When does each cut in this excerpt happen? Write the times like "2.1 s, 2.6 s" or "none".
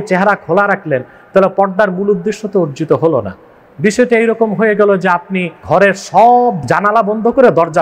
5.6 s